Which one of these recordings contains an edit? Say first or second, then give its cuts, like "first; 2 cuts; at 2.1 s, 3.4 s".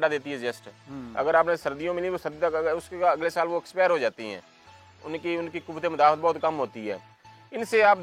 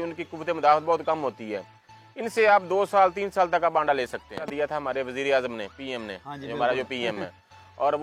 second; 1 cut; at 4.5 s